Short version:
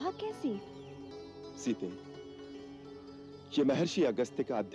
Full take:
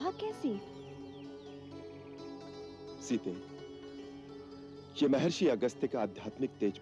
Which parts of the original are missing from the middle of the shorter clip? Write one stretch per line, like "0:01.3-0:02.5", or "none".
0:01.1-0:02.5